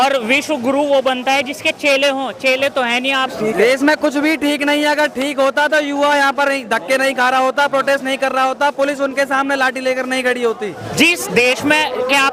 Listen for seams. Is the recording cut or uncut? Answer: cut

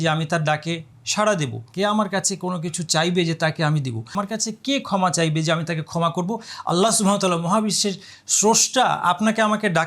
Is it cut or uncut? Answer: cut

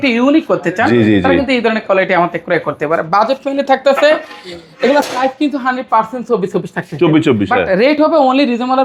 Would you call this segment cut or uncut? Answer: uncut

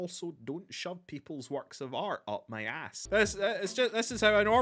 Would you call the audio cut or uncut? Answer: cut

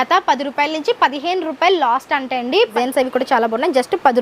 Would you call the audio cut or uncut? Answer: cut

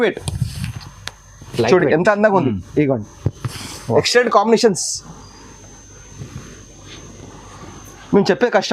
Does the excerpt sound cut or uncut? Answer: uncut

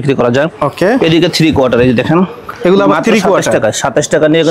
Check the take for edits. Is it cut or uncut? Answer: uncut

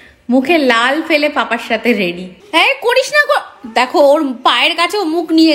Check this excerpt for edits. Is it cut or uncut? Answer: cut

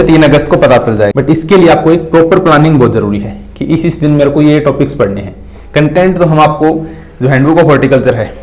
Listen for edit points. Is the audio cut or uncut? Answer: cut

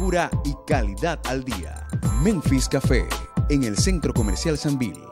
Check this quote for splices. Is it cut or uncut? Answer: uncut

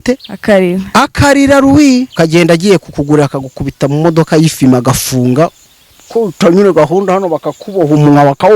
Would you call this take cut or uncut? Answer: cut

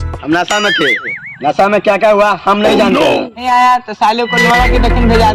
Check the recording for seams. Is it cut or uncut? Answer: cut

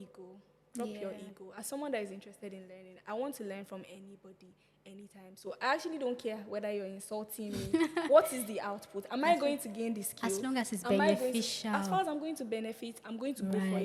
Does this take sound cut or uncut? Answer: uncut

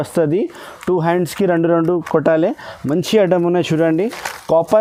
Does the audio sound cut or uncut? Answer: uncut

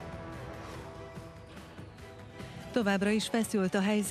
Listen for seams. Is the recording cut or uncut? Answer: uncut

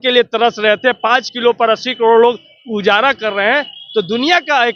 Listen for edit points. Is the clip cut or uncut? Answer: uncut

